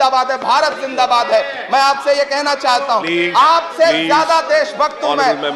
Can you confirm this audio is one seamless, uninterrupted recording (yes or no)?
yes